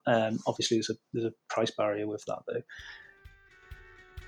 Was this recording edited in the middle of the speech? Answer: yes; 1 cut; at 3.4 s

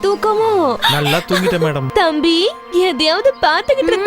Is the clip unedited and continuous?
no; 2 cuts; at 0.8 s, 1.8 s

